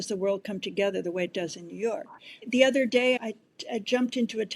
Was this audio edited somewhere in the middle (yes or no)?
yes